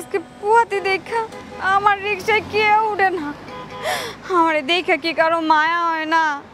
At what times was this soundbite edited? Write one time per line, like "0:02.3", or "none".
none